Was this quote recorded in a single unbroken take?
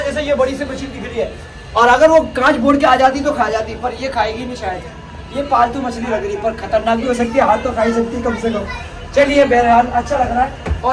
yes; 0 cuts

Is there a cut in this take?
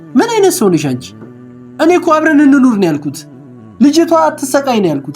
yes; 1 cut; at 1.3 s

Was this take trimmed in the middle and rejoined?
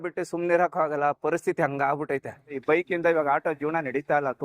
yes; 1 cut; at 2.6 s

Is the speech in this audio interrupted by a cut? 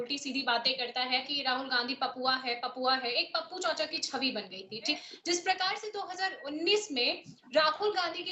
yes; 2 cuts; at 1.3 s, 5.1 s

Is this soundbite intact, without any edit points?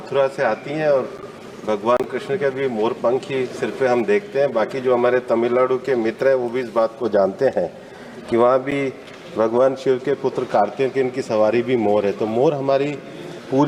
yes; 0 cuts

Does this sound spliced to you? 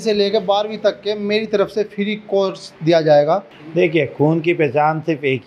yes; 1 cut; at 3.6 s

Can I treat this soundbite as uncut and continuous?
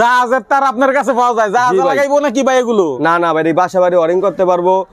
yes; 0 cuts

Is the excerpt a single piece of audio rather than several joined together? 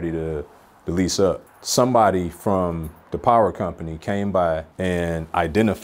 no; 2 cuts; at 1.5 s, 4.7 s

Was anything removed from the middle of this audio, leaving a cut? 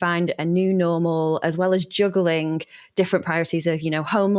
no; 0 cuts

